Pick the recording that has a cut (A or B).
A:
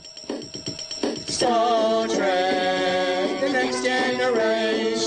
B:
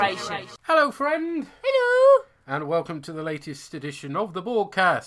A